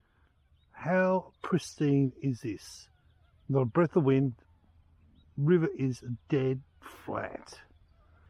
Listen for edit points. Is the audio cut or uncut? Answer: uncut